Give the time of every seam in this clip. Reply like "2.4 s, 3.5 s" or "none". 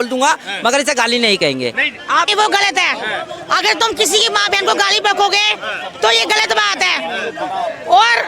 2.3 s